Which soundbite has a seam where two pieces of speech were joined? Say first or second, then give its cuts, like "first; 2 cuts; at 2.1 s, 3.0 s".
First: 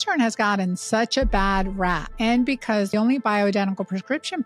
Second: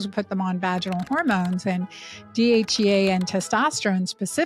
first; 2 cuts; at 2.1 s, 2.9 s